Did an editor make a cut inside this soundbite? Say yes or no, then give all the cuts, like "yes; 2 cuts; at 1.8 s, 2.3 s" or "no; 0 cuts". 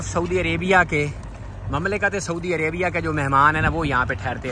no; 0 cuts